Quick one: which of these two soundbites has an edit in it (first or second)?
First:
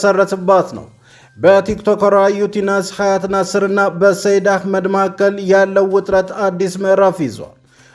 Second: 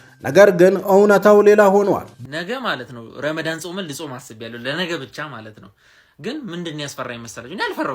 second